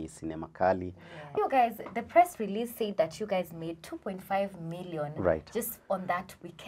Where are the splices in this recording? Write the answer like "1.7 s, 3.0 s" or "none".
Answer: 1.4 s